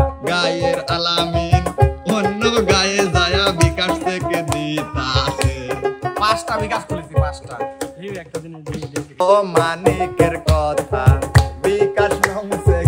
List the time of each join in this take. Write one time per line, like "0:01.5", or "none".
0:09.2